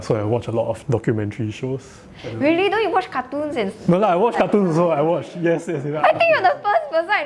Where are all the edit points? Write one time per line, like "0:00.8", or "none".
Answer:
0:05.9